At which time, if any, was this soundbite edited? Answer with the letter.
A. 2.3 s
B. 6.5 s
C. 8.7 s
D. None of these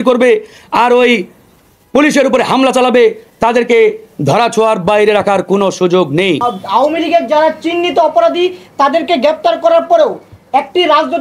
B